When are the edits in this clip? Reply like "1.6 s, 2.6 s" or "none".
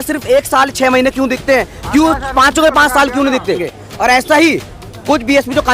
3.7 s